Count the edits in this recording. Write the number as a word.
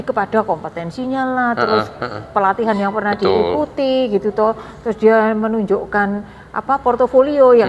zero